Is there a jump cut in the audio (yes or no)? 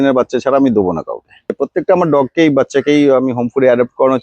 yes